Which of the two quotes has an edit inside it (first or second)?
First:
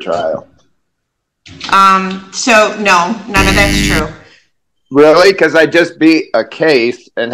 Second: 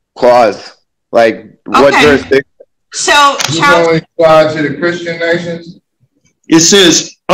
second